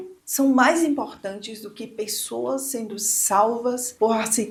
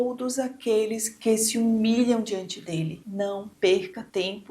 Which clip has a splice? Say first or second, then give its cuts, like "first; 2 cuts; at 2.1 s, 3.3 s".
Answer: second; 1 cut; at 2.9 s